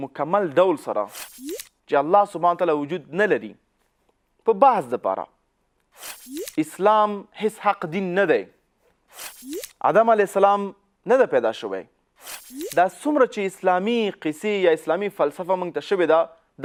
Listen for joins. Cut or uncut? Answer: uncut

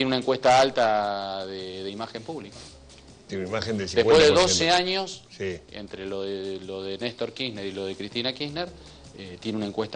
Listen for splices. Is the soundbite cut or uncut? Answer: uncut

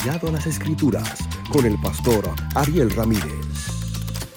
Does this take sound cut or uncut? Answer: uncut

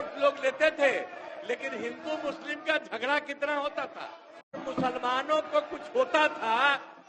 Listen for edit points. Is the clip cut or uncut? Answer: cut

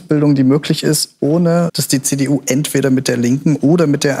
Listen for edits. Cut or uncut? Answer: uncut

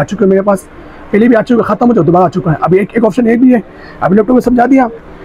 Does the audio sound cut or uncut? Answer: uncut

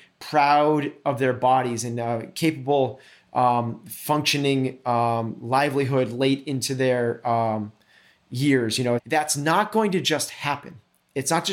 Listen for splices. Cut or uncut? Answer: cut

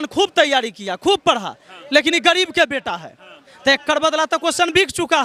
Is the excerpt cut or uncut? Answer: uncut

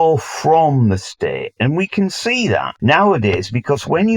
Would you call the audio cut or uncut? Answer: cut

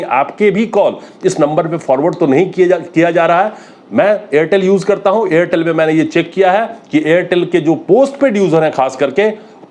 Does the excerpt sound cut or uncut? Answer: uncut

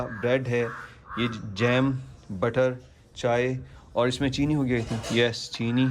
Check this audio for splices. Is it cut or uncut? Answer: uncut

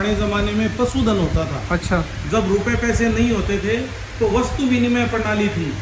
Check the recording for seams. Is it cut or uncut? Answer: uncut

